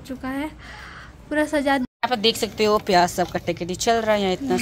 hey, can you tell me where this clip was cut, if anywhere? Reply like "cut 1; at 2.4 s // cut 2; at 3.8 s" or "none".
cut 1; at 1.8 s

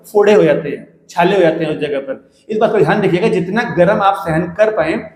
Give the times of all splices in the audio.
none

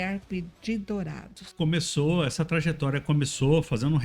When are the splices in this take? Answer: cut 1; at 1.4 s

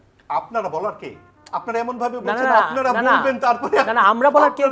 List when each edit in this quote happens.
none

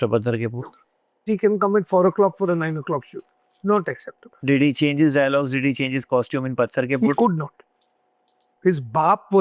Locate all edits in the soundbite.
cut 1; at 1.3 s // cut 2; at 4.3 s

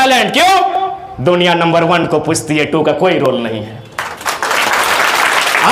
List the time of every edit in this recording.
none

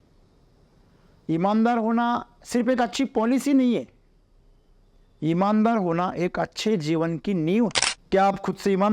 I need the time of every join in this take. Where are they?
cut 1; at 7.9 s

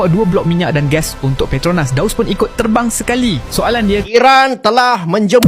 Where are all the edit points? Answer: cut 1; at 4.1 s

